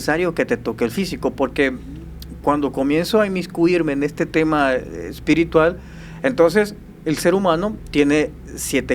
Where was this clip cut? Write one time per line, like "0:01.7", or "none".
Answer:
none